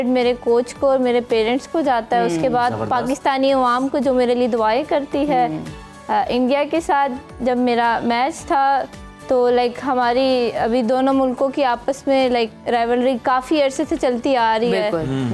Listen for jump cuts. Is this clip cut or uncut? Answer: uncut